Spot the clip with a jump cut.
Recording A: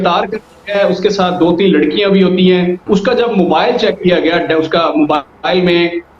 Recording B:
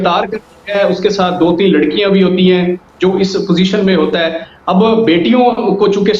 A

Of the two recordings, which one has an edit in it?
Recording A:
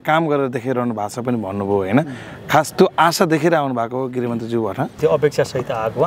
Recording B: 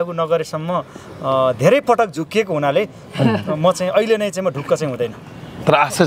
A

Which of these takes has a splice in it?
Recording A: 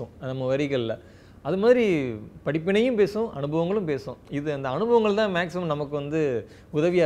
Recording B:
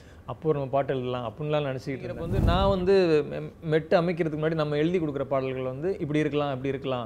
B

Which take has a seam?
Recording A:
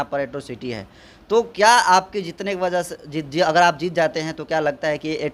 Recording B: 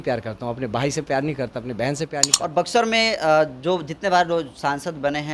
B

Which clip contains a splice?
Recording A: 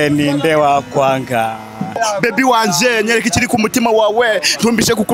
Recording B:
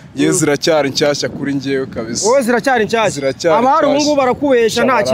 A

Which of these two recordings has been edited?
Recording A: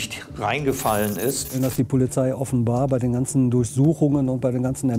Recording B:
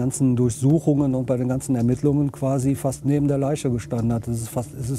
A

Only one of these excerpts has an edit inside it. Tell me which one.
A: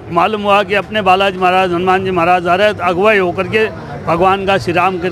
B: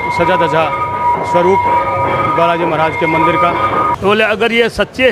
B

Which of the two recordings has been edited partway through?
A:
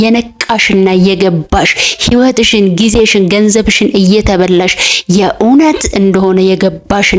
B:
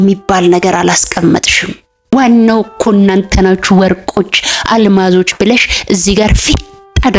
B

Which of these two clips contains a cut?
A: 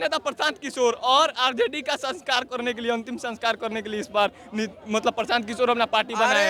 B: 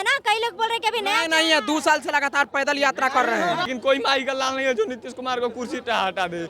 B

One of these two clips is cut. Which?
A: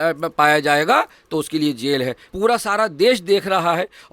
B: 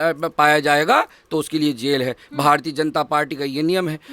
A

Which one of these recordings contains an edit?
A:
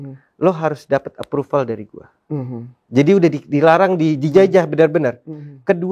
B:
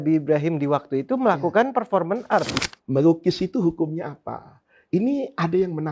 B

